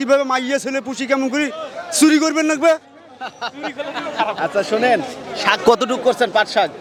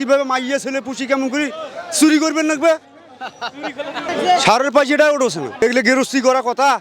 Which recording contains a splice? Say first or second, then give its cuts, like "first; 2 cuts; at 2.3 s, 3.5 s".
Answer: second; 1 cut; at 4.0 s